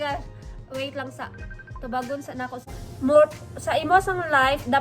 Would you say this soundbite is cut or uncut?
cut